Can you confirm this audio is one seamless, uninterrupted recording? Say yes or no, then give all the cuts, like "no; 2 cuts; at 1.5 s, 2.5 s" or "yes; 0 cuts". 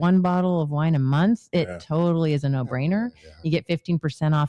yes; 0 cuts